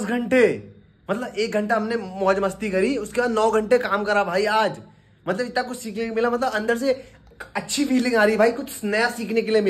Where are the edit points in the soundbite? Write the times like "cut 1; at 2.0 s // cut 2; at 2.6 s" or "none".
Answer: none